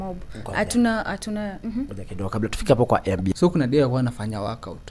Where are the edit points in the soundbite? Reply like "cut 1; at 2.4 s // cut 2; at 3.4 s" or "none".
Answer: cut 1; at 3.3 s